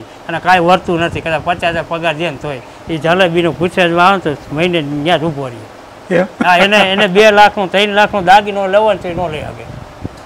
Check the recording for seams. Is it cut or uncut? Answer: uncut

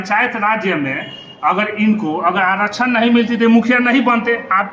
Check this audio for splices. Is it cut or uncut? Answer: uncut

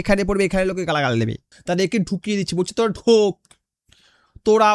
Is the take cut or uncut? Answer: cut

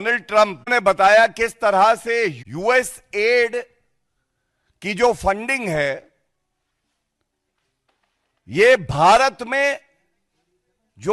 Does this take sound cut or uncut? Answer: cut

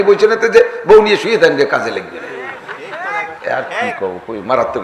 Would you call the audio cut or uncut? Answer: uncut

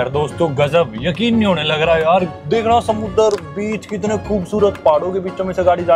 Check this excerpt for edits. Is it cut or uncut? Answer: cut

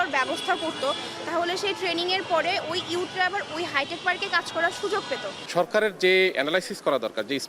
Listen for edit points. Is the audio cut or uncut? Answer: cut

